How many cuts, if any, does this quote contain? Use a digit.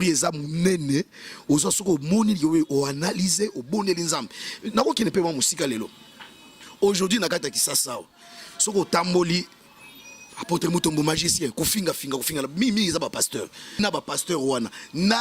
1